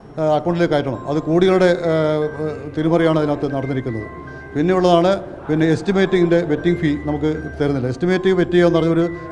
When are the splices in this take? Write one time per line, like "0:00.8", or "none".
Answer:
none